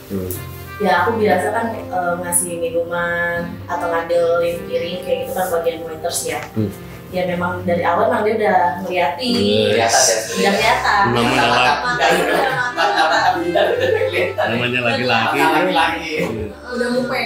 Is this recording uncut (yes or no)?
yes